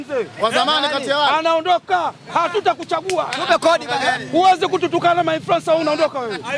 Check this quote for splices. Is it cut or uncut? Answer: uncut